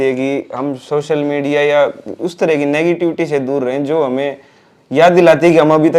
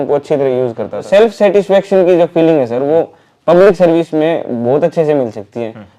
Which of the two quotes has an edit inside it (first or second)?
second